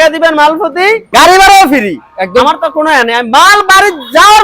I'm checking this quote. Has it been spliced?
yes; 1 cut; at 1.0 s

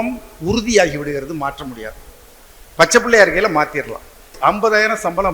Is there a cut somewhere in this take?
yes; 1 cut; at 4.3 s

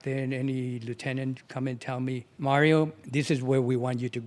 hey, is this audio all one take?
no; 2 cuts; at 2.3 s, 3.0 s

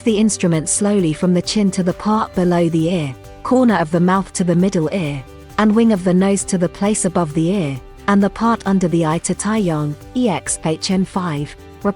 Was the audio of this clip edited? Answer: no; 0 cuts

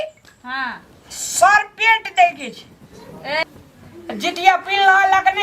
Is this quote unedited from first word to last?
no; 1 cut; at 3.4 s

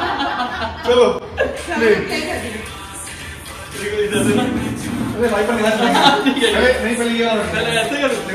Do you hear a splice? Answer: no; 0 cuts

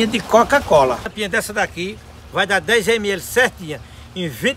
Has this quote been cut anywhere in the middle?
yes; 1 cut; at 1.1 s

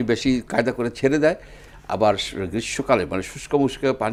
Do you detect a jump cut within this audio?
no; 0 cuts

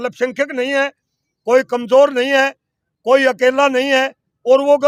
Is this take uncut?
yes; 0 cuts

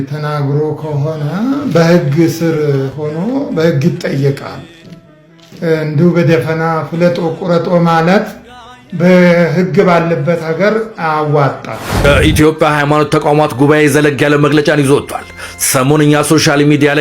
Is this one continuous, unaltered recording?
no; 1 cut; at 11.9 s

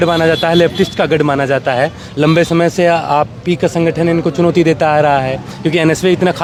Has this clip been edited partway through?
no; 0 cuts

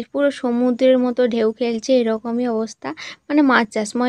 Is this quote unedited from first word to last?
yes; 0 cuts

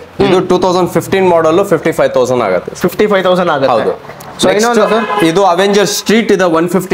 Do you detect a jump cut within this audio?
no; 0 cuts

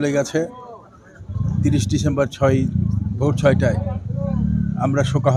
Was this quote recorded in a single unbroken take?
yes; 0 cuts

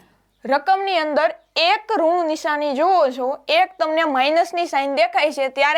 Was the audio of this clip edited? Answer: no; 0 cuts

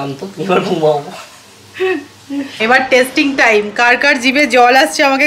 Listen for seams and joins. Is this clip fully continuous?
no; 1 cut; at 2.5 s

